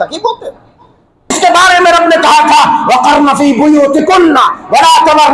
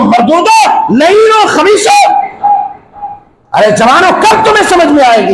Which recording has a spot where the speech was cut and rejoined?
first; 1 cut; at 1.4 s

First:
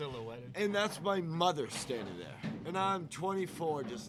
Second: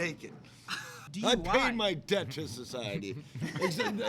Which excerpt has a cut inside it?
second; 1 cut; at 1.0 s

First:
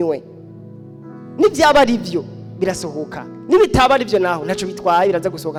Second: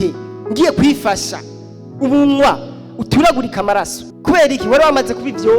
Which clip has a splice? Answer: second; 1 cut; at 4.0 s

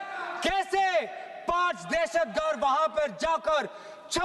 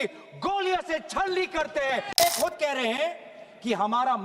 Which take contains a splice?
second; 1 cut; at 2.2 s

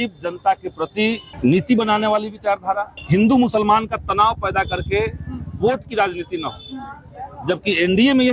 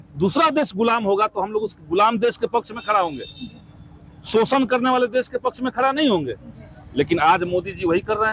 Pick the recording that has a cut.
first; 2 cuts; at 1.3 s, 2.9 s

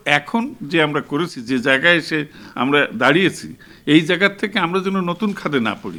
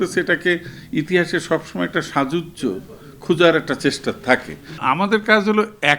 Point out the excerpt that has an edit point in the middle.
second; 1 cut; at 4.8 s

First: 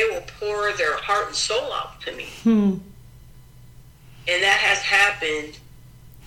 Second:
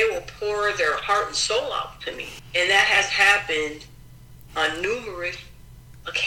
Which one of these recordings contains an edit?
second; 1 cut; at 2.3 s

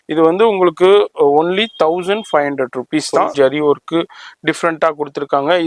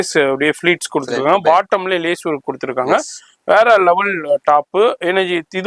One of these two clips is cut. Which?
first; 1 cut; at 3.3 s

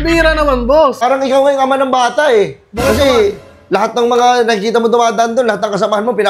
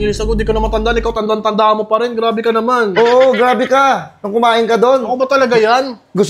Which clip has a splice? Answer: first; 1 cut; at 1.0 s

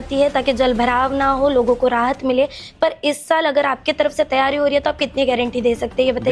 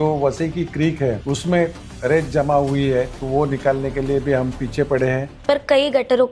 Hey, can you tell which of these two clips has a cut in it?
second; 2 cuts; at 1.2 s, 5.3 s

